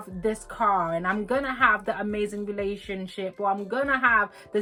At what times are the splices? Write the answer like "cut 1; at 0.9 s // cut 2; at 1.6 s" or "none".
none